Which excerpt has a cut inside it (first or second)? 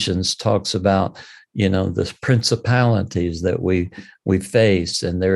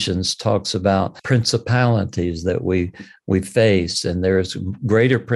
second